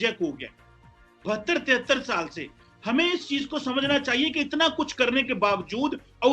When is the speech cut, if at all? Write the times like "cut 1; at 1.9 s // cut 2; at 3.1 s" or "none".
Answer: none